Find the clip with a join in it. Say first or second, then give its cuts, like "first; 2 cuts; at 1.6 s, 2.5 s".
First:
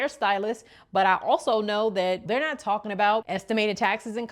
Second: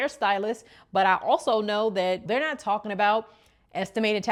first; 1 cut; at 3.3 s